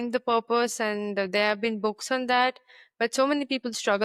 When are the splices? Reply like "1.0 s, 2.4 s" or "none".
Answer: none

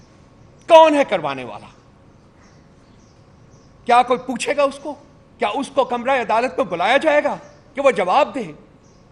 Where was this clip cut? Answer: none

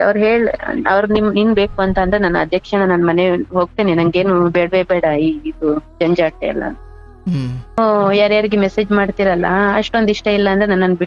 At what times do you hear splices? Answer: 7.8 s

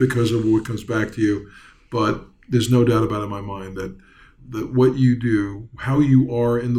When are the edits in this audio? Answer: 4.3 s

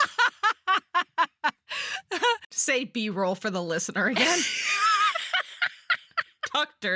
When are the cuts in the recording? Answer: 2.5 s

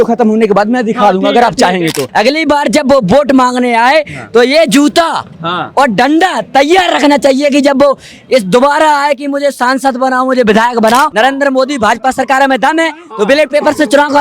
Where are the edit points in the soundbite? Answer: 2.0 s, 11.1 s

